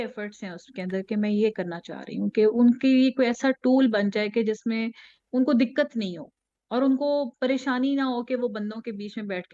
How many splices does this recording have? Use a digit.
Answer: 0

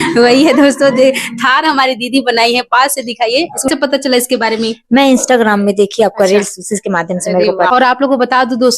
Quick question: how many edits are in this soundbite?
2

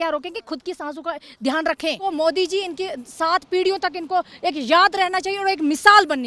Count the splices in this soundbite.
1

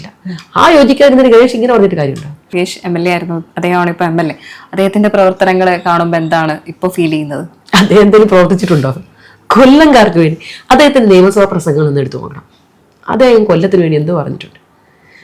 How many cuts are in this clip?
1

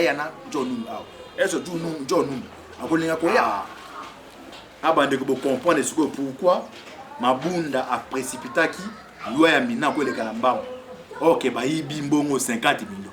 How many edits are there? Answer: 1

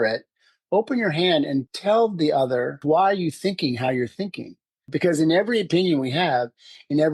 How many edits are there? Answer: 3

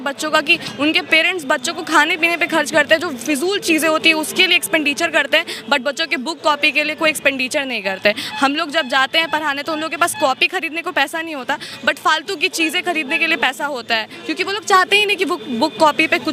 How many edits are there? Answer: 0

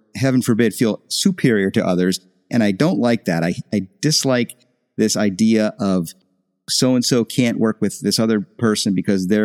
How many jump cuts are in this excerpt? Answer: 0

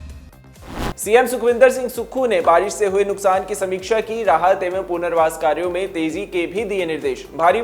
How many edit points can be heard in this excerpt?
1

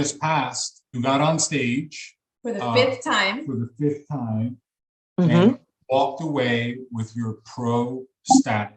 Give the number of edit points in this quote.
1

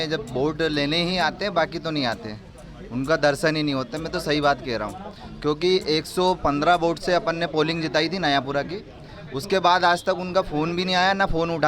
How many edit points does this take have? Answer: 0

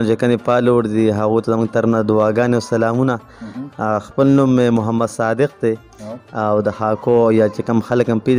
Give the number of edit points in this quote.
0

